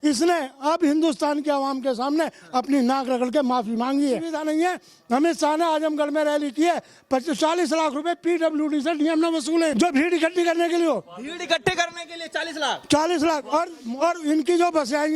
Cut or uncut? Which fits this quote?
cut